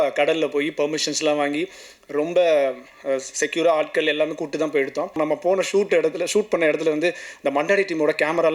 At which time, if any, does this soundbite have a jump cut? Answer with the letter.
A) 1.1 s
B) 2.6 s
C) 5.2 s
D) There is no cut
C